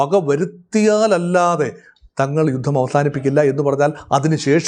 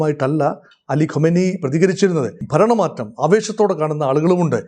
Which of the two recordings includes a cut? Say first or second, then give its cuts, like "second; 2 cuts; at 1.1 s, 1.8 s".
second; 1 cut; at 2.4 s